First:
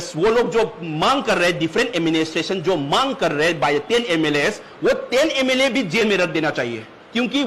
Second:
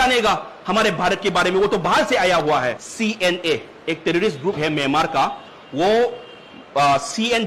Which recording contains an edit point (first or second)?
second